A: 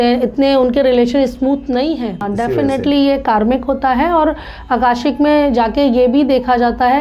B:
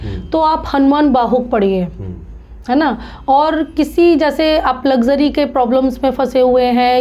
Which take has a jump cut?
A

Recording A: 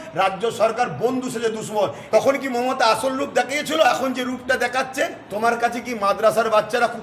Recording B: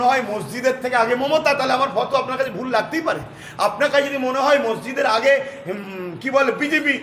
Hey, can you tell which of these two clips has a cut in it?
A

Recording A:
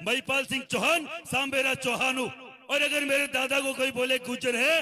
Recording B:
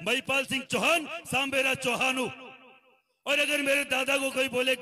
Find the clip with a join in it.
A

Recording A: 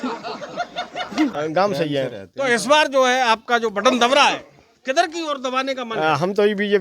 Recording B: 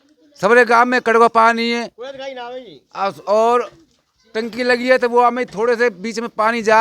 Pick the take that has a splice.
A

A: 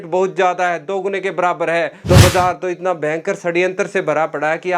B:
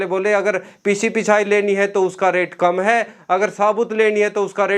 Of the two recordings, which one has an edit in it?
A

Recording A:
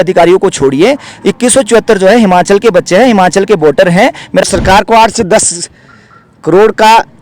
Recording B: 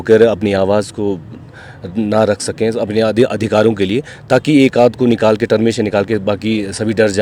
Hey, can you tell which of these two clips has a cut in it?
A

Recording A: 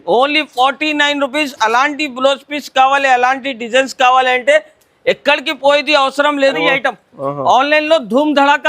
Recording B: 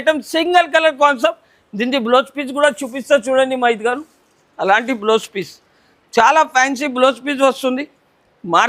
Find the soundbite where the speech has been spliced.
A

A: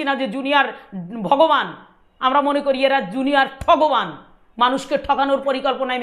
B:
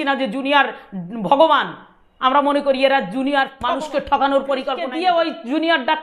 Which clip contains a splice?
B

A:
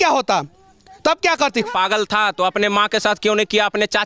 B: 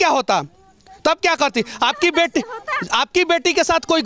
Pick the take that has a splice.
A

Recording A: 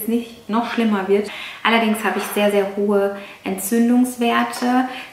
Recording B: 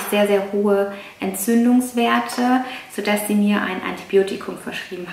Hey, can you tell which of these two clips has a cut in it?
A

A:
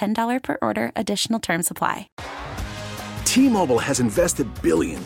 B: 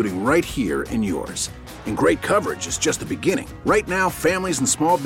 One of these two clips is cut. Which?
A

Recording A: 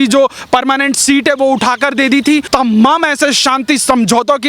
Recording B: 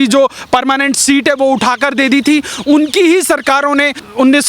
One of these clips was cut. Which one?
A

